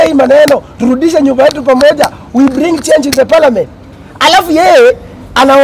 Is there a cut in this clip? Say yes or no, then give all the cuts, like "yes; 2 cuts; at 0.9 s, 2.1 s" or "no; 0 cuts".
no; 0 cuts